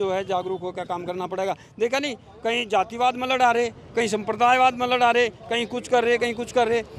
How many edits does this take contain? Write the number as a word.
zero